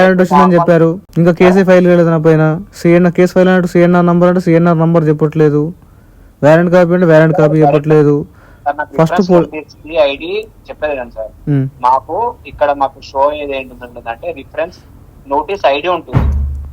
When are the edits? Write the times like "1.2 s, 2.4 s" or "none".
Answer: 1.1 s